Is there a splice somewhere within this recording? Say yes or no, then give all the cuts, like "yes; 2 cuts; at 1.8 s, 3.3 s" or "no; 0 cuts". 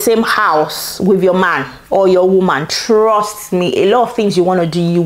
no; 0 cuts